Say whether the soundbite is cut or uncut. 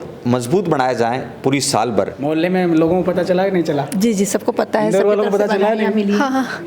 cut